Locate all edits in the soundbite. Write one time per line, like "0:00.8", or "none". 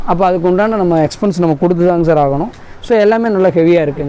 none

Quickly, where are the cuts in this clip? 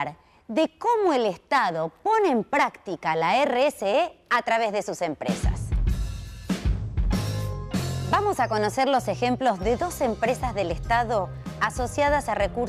0:03.2

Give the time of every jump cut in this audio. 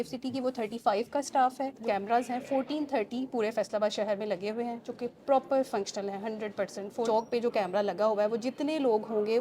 0:01.8
0:07.1

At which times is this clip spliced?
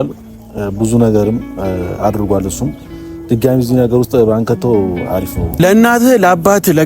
0:05.6

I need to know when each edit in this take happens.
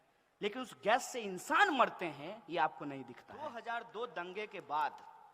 0:03.4

